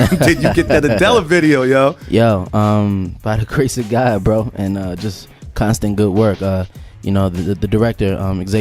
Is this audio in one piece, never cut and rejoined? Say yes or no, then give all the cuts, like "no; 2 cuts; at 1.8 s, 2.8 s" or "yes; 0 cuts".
no; 1 cut; at 5.0 s